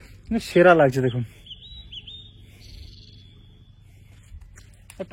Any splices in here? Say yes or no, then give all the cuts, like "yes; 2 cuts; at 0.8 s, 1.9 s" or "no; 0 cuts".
no; 0 cuts